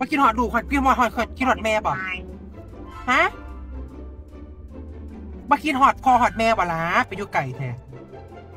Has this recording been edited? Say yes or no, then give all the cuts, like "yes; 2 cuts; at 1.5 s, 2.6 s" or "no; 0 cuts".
no; 0 cuts